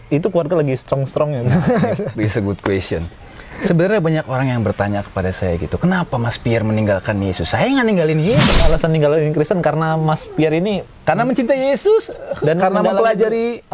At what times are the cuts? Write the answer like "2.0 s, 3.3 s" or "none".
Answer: 8.6 s